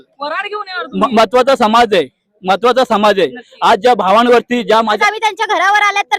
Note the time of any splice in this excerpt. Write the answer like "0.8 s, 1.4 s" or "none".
4.8 s